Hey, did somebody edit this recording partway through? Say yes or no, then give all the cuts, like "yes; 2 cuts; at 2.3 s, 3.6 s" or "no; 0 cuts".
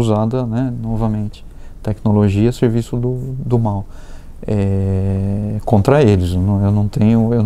no; 0 cuts